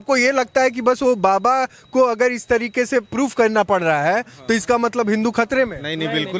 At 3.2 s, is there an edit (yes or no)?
no